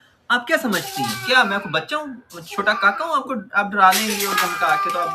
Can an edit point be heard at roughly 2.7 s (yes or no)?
no